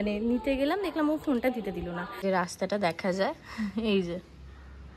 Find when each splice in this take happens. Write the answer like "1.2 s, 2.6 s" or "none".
2.0 s